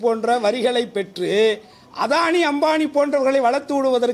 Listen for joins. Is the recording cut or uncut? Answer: uncut